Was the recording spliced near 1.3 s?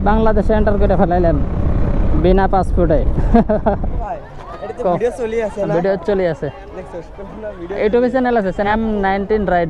no; 2 cuts; at 4.0 s, 8.7 s

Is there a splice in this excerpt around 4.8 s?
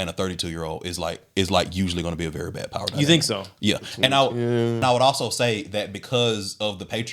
yes; 1 cut; at 4.8 s

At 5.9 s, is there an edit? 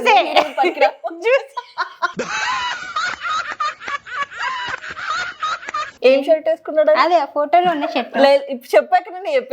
yes; 1 cut; at 5.9 s

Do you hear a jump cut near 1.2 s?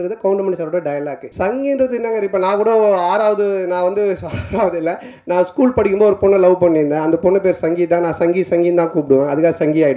yes; 1 cut; at 1.2 s

